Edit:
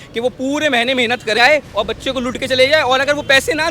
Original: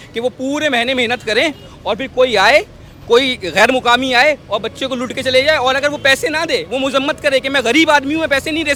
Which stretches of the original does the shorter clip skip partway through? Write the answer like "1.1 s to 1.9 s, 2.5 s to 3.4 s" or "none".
1.4 s to 4.1 s